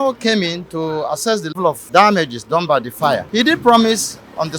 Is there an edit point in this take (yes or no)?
yes